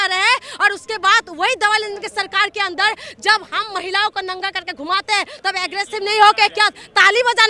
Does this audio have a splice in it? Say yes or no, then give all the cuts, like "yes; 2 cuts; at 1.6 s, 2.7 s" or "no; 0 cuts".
no; 0 cuts